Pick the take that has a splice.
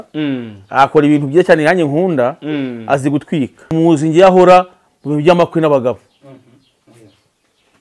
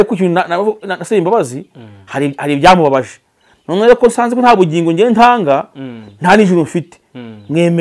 first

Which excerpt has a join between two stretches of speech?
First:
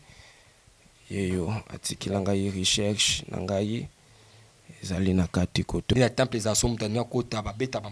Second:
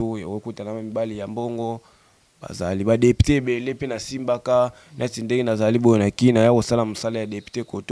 first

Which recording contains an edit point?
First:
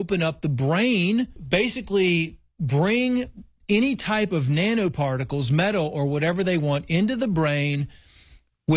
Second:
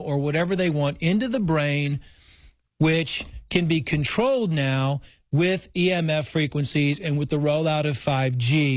first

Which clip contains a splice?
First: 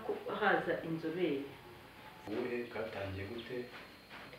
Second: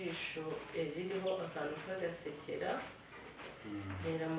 first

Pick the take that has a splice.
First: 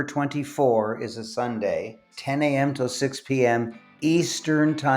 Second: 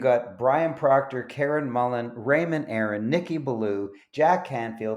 first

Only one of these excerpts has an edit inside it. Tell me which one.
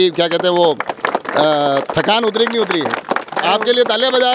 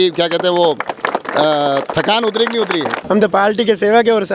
second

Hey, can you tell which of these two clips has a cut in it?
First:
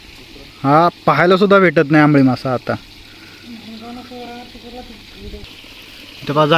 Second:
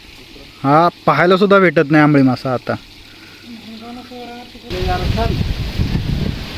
second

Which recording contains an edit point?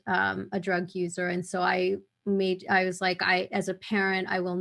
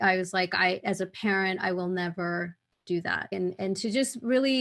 second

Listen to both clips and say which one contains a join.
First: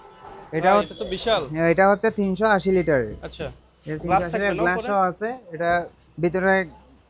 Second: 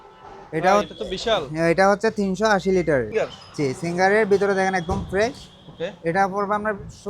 second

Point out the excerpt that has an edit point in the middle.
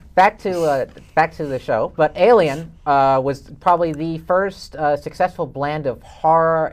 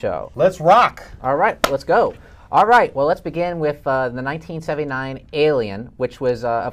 second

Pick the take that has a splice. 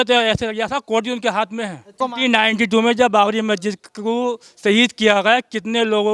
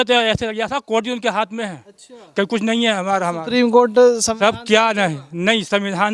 first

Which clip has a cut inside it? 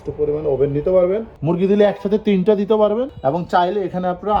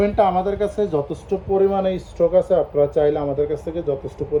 first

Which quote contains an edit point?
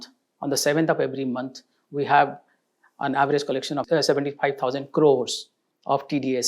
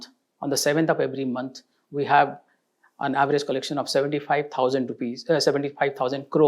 first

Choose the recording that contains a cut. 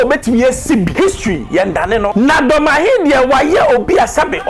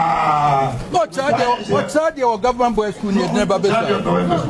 first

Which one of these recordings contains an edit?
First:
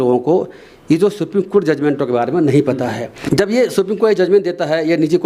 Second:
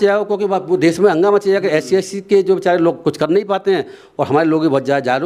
first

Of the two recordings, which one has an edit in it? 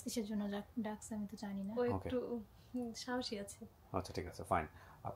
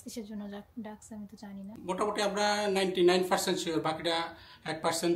second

